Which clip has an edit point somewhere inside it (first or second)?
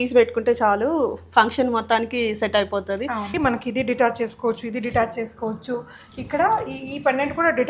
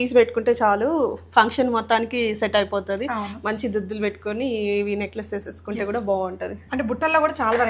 first